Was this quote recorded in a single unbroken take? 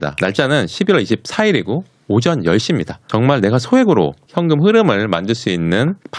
no; 1 cut; at 3.0 s

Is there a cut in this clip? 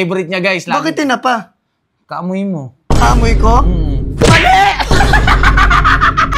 no; 0 cuts

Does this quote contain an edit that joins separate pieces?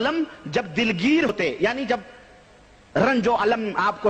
yes; 1 cut; at 1.3 s

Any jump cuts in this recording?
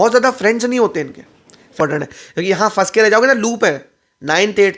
yes; 1 cut; at 1.8 s

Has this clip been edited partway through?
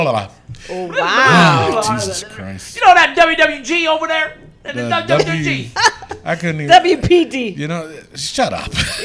no; 0 cuts

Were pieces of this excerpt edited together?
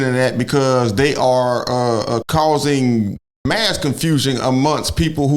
yes; 1 cut; at 2.2 s

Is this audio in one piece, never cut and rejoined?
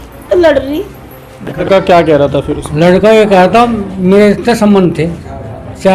no; 1 cut; at 1.6 s

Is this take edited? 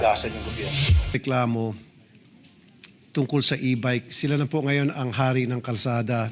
yes; 1 cut; at 1.2 s

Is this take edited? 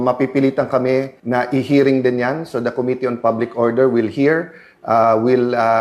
yes; 1 cut; at 1.2 s

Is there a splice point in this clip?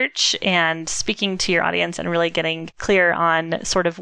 yes; 1 cut; at 2.7 s

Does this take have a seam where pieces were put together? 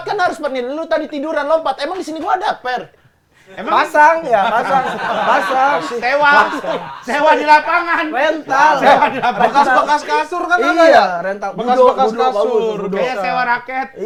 no; 0 cuts

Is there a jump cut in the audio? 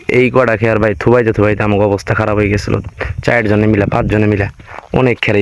no; 0 cuts

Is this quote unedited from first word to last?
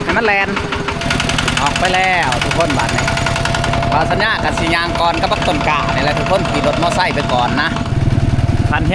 no; 2 cuts; at 1.1 s, 8.1 s

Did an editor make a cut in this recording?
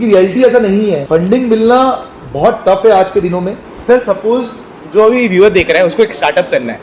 yes; 2 cuts; at 1.0 s, 3.7 s

